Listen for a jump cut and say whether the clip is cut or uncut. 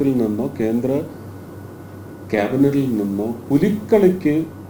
uncut